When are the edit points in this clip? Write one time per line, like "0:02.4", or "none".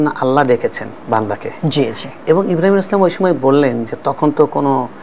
none